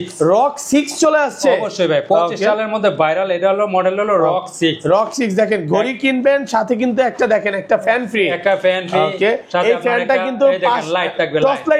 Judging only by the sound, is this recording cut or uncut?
uncut